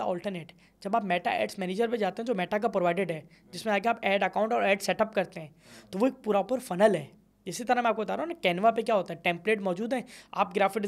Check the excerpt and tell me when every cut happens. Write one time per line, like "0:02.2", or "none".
none